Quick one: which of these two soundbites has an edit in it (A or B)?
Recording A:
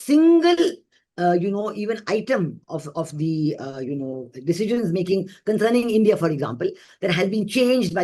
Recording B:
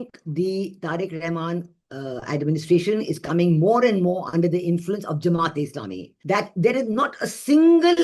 B